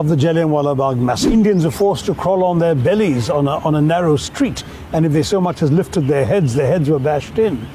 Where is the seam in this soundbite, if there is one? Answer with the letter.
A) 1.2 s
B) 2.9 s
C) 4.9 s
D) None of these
A